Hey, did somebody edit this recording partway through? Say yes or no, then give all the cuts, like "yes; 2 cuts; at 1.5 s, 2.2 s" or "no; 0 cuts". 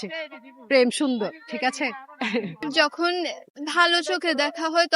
yes; 1 cut; at 2.7 s